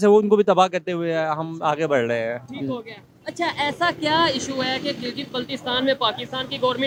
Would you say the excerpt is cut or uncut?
uncut